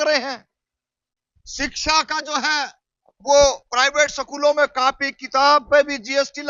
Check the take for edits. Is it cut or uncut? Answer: uncut